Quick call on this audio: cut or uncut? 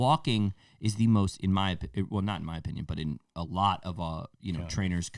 uncut